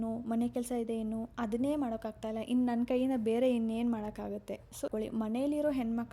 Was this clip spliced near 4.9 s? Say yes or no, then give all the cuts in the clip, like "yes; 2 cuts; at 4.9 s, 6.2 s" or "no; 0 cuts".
yes; 1 cut; at 4.9 s